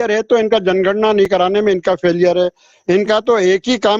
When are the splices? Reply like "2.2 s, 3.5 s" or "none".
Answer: none